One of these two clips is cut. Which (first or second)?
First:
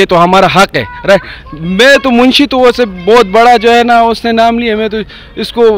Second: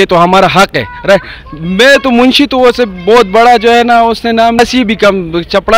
second